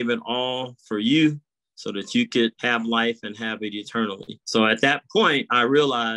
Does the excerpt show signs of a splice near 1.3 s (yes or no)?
no